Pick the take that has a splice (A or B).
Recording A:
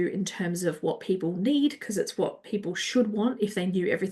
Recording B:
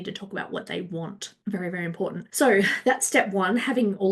B